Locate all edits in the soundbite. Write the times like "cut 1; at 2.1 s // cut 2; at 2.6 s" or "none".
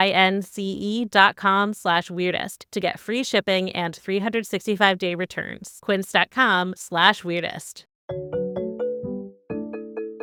none